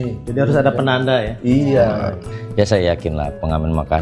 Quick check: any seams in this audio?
yes; 1 cut; at 2.3 s

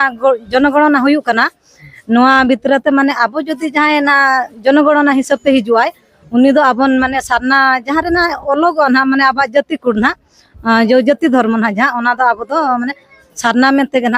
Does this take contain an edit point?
no; 0 cuts

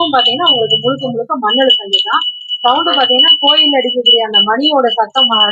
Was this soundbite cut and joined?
no; 0 cuts

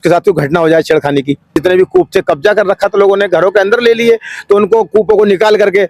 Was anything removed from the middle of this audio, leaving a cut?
yes; 1 cut; at 1.6 s

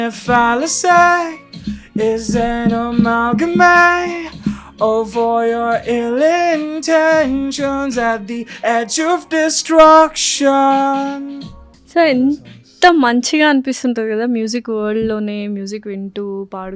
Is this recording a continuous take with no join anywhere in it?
yes; 0 cuts

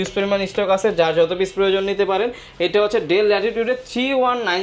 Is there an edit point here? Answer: no; 0 cuts

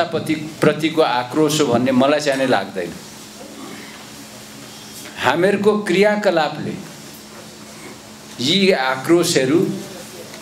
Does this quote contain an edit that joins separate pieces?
no; 0 cuts

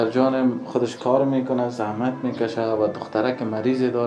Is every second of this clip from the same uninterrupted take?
yes; 0 cuts

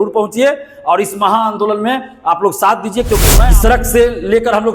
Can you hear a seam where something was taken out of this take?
yes; 1 cut; at 3.4 s

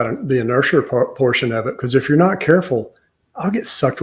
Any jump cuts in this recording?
no; 0 cuts

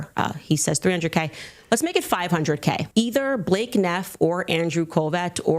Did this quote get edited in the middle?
yes; 1 cut; at 2.8 s

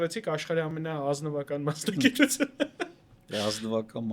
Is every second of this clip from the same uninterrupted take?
yes; 0 cuts

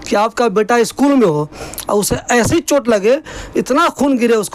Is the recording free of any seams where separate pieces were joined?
yes; 0 cuts

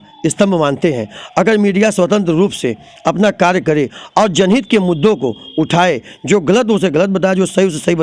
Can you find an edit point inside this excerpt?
no; 0 cuts

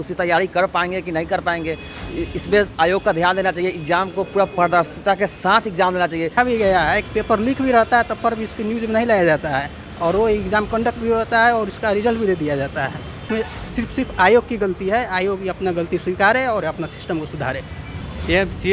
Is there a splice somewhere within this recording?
yes; 3 cuts; at 6.3 s, 13.2 s, 18.0 s

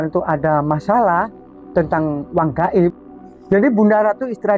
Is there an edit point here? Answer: yes; 1 cut; at 3.2 s

